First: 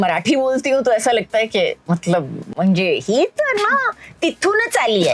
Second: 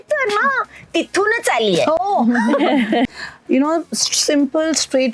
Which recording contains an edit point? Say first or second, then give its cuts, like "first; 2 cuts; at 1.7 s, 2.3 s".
second; 1 cut; at 3.1 s